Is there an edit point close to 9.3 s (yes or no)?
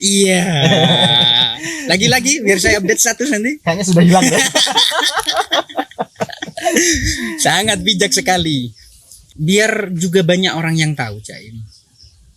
yes